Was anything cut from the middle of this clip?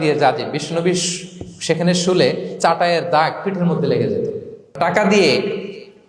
yes; 1 cut; at 4.8 s

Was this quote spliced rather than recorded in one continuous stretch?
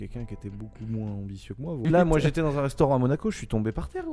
yes; 1 cut; at 1.8 s

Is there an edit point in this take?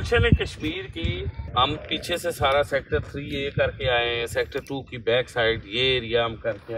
yes; 1 cut; at 1.4 s

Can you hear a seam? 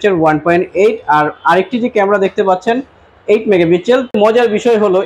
yes; 1 cut; at 4.1 s

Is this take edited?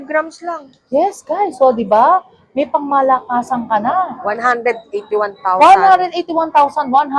no; 0 cuts

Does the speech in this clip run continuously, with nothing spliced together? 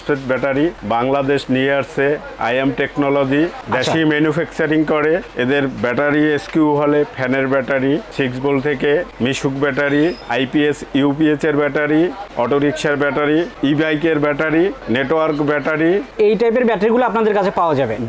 yes; 0 cuts

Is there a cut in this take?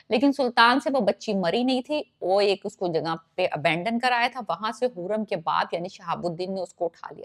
no; 0 cuts

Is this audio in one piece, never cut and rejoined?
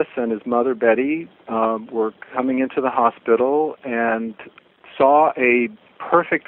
yes; 0 cuts

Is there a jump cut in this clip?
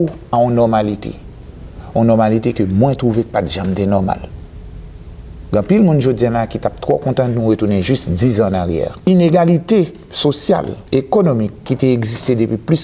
yes; 3 cuts; at 8.9 s, 10.8 s, 11.7 s

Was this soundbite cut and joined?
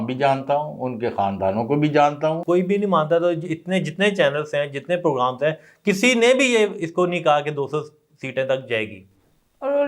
yes; 1 cut; at 2.4 s

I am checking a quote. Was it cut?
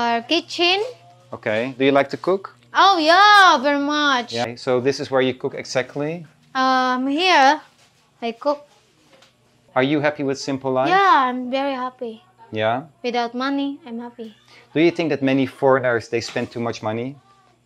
yes; 2 cuts; at 4.4 s, 9.5 s

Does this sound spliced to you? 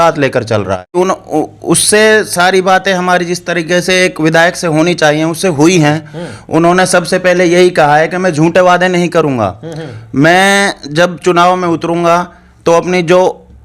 yes; 1 cut; at 1.0 s

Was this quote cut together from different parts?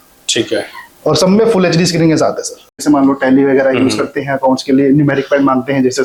no; 0 cuts

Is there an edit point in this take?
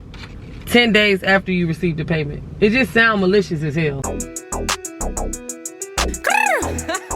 yes; 1 cut; at 4.0 s

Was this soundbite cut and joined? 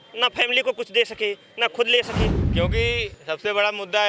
yes; 1 cut; at 2.4 s

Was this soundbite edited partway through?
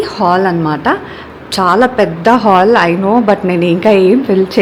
no; 0 cuts

